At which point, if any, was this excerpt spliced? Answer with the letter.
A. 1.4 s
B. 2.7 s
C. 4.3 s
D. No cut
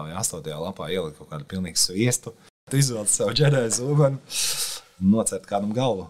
B